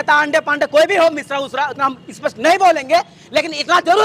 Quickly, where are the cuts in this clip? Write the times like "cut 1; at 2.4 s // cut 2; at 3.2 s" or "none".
none